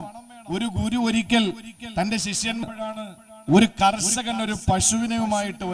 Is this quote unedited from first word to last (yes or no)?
no